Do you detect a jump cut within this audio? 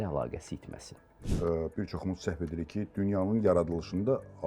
yes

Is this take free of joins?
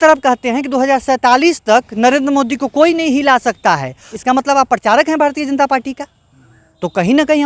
no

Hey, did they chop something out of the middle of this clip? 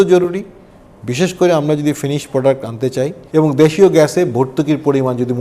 yes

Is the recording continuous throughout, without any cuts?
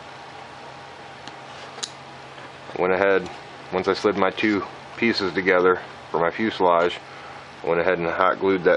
yes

